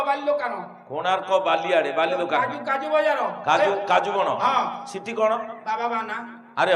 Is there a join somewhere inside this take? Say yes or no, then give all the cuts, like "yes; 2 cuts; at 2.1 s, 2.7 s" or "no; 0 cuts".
no; 0 cuts